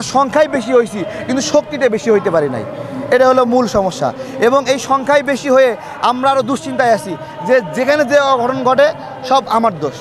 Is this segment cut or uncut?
uncut